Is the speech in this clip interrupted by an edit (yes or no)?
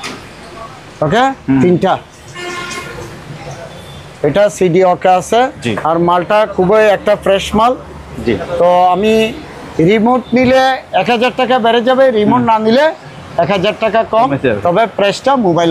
no